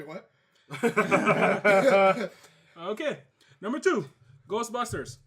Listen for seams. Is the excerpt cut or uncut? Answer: cut